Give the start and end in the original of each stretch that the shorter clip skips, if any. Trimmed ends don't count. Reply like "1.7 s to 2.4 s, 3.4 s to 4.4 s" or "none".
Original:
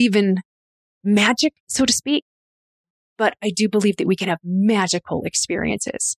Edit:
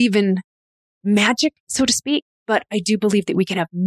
2.3 s to 3.0 s